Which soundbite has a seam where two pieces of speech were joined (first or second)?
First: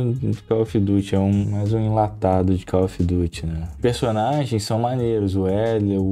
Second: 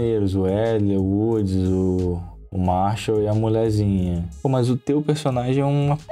first